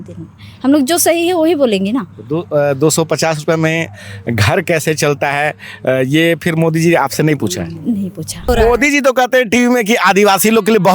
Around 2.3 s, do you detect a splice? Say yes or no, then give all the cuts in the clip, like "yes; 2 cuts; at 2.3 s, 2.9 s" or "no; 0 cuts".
no; 1 cut; at 8.4 s